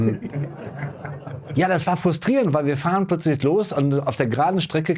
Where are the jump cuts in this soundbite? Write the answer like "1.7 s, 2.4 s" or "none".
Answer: 1.4 s